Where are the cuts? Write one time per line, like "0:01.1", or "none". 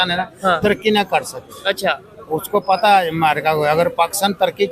none